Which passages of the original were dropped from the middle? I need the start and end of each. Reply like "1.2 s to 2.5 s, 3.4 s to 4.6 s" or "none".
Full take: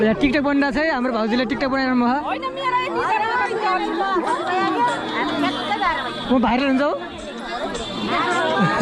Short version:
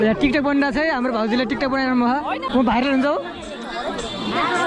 2.4 s to 6.2 s